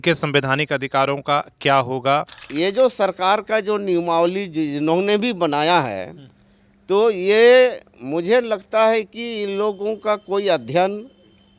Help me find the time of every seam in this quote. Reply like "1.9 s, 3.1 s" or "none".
2.5 s